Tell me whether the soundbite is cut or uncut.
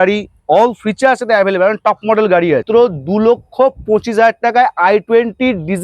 cut